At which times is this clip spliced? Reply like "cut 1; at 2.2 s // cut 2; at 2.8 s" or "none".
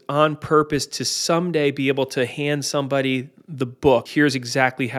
cut 1; at 4.1 s